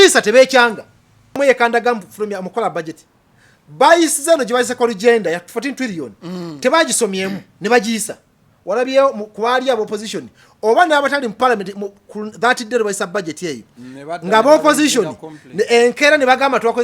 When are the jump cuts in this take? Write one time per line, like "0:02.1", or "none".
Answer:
0:01.4